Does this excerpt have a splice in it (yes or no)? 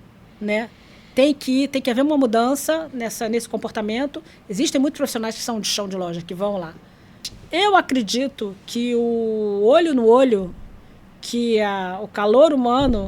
yes